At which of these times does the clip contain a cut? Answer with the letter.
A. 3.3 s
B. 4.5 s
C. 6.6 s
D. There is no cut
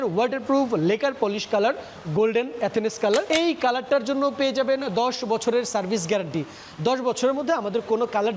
A